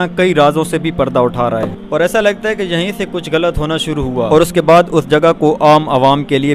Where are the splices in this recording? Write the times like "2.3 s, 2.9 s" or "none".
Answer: 1.7 s, 4.3 s